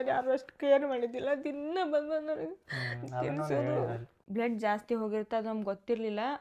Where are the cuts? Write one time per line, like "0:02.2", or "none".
0:04.1